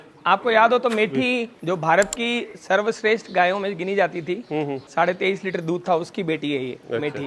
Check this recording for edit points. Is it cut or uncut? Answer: cut